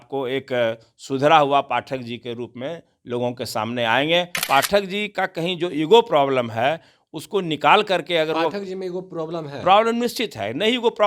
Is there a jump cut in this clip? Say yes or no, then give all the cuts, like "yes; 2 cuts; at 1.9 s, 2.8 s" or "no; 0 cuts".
yes; 1 cut; at 4.4 s